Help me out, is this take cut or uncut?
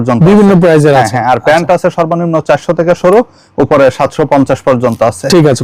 uncut